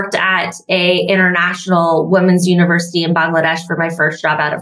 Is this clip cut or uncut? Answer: uncut